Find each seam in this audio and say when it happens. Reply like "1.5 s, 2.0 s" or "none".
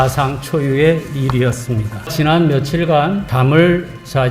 2.1 s, 3.3 s